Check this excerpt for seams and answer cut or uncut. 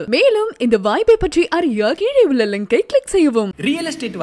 uncut